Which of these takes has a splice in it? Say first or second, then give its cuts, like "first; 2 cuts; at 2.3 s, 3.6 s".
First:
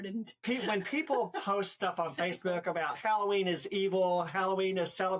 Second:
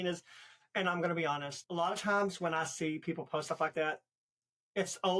second; 1 cut; at 1.6 s